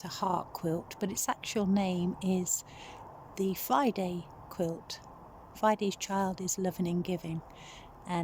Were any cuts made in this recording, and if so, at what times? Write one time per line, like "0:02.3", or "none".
none